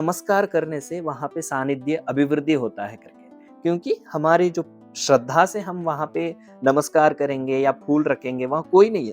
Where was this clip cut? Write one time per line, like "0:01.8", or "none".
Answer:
none